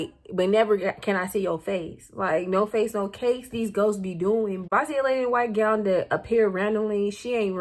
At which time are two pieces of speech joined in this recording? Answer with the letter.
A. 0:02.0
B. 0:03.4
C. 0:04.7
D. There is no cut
C